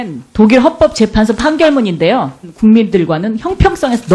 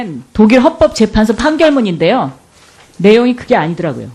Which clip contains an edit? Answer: second; 1 cut; at 2.5 s

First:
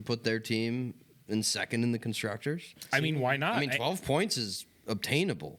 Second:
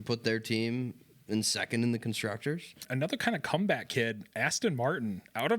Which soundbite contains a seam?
second; 1 cut; at 2.8 s

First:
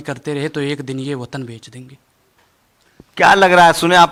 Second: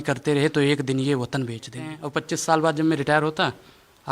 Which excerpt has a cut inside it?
second; 1 cut; at 2.0 s

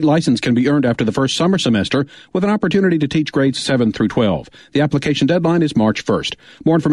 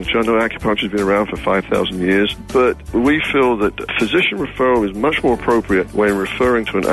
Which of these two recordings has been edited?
second; 3 cuts; at 2.8 s, 3.9 s, 5.9 s

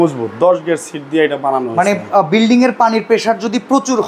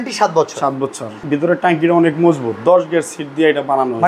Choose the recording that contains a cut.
second; 1 cut; at 1.2 s

